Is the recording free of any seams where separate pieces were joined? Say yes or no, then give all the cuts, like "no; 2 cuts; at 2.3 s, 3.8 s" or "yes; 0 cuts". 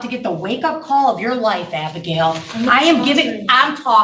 yes; 0 cuts